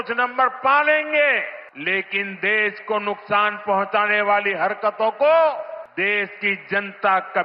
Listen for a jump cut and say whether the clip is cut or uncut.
cut